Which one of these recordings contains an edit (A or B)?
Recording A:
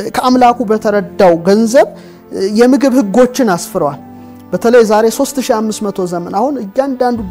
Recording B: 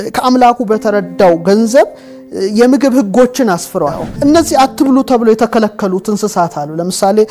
B